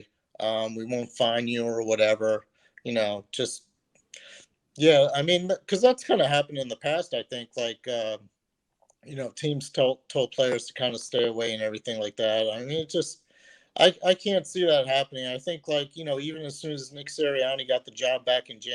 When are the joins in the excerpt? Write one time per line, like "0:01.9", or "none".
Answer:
none